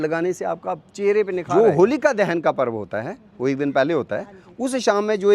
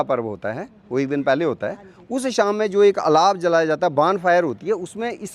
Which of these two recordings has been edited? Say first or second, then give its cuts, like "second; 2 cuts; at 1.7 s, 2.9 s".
first; 1 cut; at 1.4 s